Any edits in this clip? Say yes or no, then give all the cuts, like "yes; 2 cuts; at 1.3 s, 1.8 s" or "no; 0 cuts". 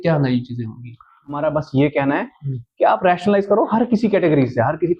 yes; 1 cut; at 1.4 s